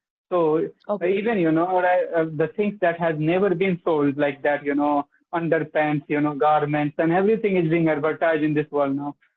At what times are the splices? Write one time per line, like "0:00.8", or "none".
none